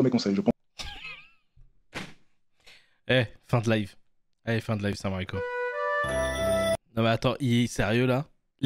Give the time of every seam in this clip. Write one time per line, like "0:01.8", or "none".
none